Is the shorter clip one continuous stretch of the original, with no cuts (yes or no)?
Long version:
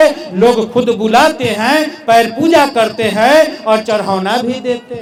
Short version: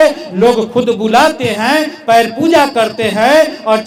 yes